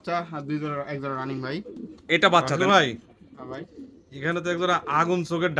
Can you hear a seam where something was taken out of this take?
yes; 1 cut; at 2.5 s

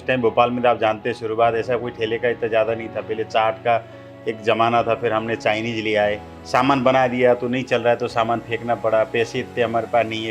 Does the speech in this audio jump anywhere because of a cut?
yes; 1 cut; at 6.3 s

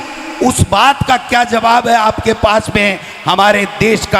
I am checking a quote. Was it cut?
no; 0 cuts

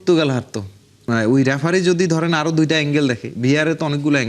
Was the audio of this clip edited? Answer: yes; 1 cut; at 1.0 s

